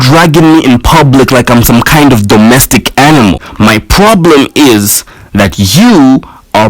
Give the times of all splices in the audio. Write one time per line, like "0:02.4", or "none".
0:03.5